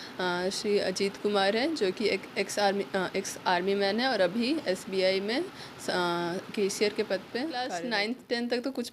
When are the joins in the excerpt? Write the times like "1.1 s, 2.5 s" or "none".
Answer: 7.7 s